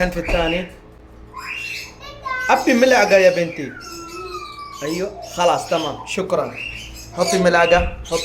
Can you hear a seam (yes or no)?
no